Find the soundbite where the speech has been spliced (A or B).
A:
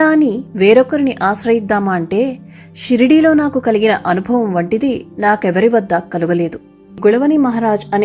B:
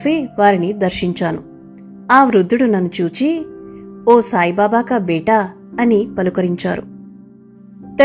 A